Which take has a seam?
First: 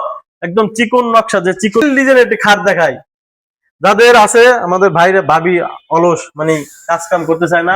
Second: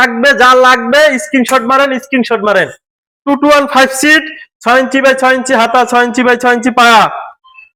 first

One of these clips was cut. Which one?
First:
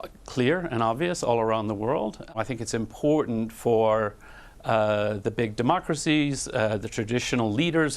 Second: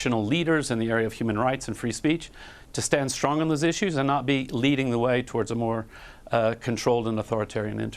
first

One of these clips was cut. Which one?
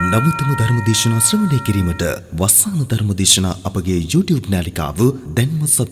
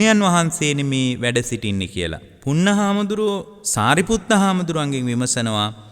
second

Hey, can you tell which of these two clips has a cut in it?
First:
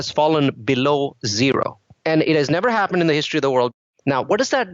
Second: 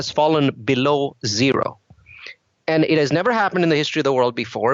first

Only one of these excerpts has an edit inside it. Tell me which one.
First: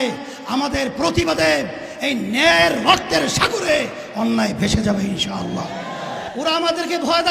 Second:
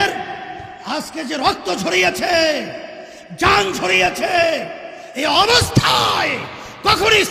first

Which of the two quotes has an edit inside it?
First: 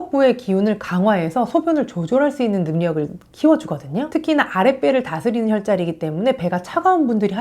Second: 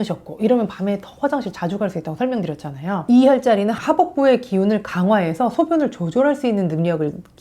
second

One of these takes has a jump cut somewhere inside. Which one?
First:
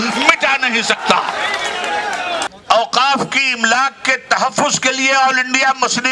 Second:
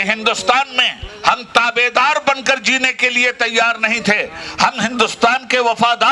first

